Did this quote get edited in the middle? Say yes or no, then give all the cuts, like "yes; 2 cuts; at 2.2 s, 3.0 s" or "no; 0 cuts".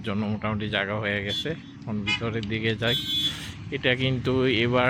no; 0 cuts